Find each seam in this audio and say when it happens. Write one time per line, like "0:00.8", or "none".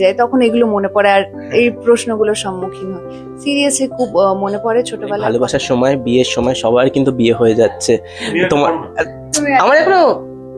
0:05.2